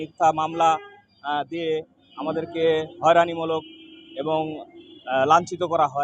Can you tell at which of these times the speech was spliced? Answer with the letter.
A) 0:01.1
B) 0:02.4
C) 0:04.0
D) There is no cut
D